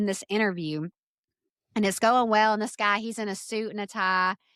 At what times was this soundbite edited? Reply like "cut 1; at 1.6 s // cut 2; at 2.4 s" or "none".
none